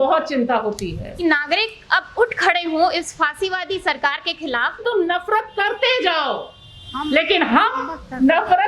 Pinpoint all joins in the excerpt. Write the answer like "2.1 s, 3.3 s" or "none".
1.2 s, 4.8 s